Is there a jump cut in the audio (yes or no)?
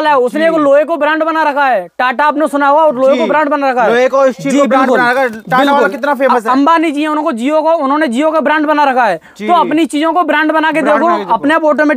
no